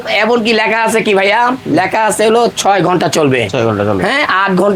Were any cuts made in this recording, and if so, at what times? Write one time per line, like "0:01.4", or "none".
none